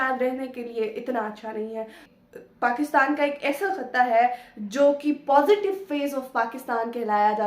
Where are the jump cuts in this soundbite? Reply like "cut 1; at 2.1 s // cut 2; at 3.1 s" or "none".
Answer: cut 1; at 2.0 s